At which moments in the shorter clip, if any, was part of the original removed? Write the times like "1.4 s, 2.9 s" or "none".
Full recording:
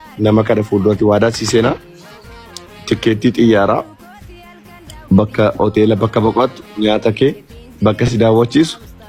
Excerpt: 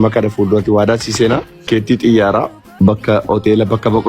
1.7 s, 2.6 s